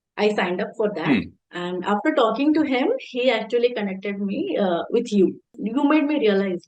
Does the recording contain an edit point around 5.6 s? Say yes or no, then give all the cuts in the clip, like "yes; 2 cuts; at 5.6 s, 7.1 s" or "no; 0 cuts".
yes; 1 cut; at 5.6 s